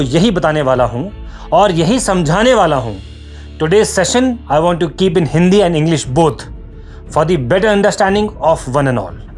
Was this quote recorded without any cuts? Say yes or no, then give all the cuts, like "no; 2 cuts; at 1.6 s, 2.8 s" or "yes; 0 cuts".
yes; 0 cuts